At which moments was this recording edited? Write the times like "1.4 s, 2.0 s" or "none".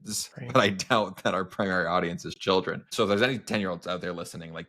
2.9 s

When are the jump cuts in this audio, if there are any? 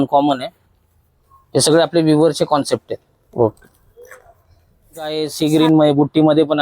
5.1 s

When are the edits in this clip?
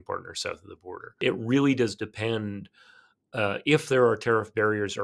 1.2 s

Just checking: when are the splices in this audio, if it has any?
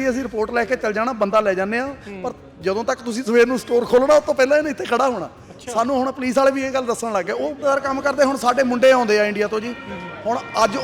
7.6 s

